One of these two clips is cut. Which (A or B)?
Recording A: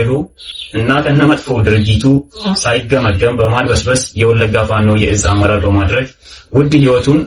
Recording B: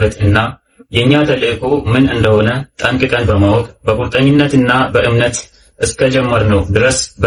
A